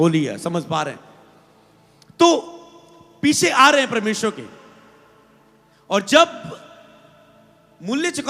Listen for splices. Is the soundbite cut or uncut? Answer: uncut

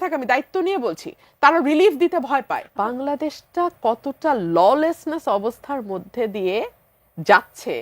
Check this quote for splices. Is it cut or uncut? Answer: cut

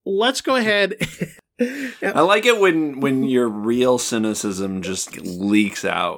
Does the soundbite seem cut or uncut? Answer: cut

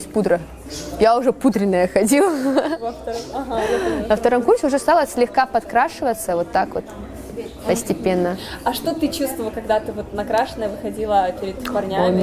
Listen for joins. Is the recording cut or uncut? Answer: uncut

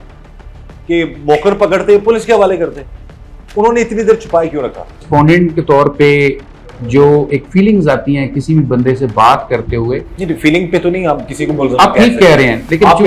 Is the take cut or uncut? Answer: cut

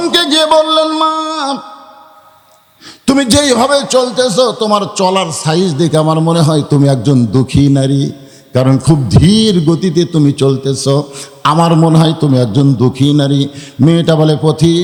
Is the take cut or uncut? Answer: uncut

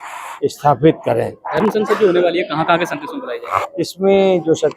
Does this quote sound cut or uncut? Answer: uncut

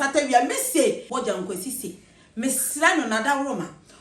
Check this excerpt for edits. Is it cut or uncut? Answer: cut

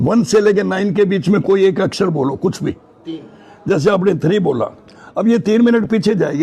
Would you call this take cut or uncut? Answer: uncut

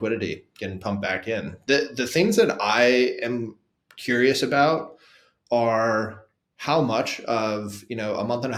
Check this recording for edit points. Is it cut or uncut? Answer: uncut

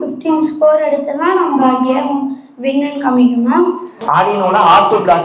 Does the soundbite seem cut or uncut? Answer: cut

